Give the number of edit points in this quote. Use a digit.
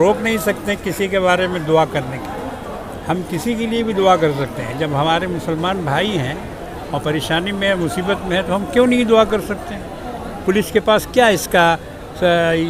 0